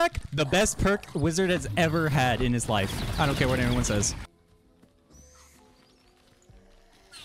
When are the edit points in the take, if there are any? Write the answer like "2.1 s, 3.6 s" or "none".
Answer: none

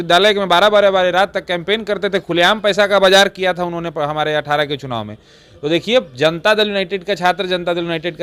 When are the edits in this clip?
none

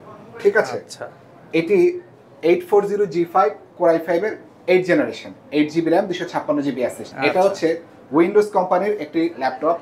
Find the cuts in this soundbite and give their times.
7.0 s

